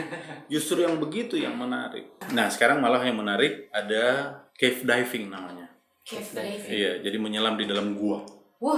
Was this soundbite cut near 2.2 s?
yes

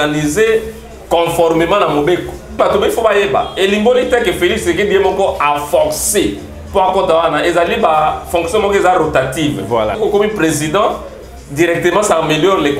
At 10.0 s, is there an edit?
yes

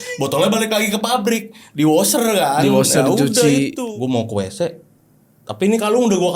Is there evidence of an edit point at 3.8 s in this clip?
yes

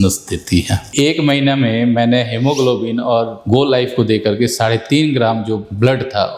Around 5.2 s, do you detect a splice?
no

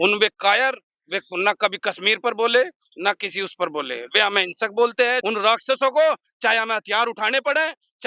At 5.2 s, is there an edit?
yes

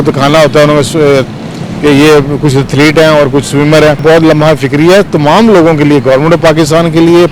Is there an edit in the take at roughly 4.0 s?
yes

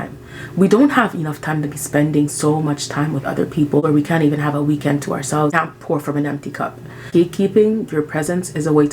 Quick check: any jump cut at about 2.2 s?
no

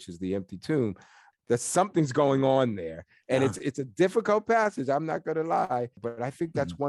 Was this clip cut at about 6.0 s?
yes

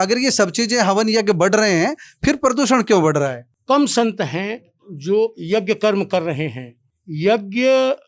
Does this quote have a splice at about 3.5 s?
yes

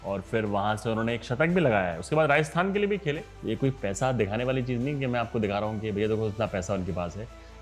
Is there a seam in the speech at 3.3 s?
yes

